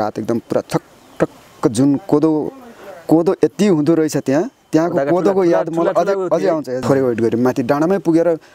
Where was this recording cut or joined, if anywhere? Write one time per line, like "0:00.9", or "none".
0:06.7